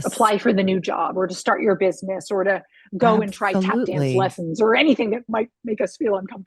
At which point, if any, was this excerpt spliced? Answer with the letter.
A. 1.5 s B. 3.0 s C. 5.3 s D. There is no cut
C